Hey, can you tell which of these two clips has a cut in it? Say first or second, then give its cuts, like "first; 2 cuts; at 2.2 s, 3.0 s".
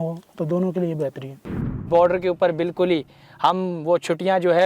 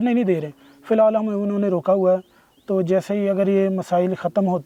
first; 1 cut; at 1.8 s